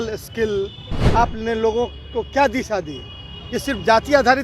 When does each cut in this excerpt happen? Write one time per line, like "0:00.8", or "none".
0:01.0